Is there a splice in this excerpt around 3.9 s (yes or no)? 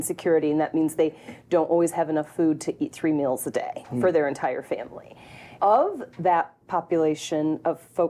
no